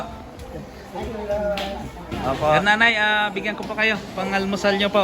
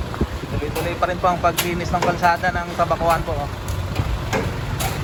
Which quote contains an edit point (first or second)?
first